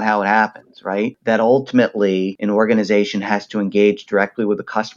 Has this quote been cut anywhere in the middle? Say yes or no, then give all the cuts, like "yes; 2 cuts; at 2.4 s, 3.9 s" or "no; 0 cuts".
yes; 2 cuts; at 1.2 s, 2.4 s